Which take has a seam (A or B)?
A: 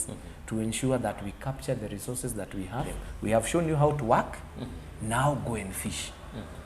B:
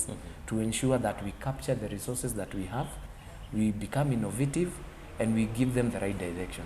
A